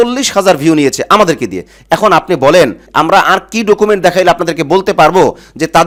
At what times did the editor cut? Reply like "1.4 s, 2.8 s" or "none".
none